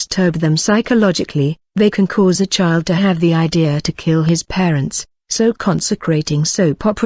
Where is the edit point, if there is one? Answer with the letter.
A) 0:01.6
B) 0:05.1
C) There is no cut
B